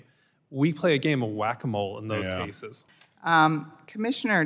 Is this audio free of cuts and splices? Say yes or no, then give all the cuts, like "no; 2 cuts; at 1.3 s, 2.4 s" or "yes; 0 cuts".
yes; 0 cuts